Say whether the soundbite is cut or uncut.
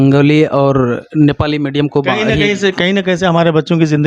uncut